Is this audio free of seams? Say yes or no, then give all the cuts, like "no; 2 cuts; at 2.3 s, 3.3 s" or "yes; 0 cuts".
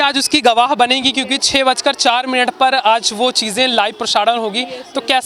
yes; 0 cuts